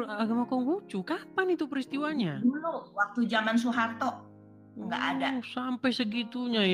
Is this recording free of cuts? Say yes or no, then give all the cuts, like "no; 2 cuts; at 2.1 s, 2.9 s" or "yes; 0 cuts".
yes; 0 cuts